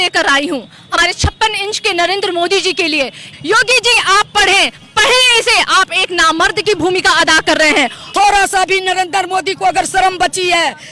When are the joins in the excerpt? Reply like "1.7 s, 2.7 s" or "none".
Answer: 0.9 s, 3.3 s, 8.0 s